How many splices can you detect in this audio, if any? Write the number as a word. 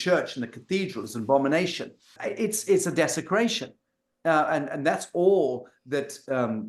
one